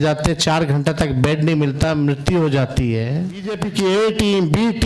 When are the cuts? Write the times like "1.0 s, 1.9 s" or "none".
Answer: 3.5 s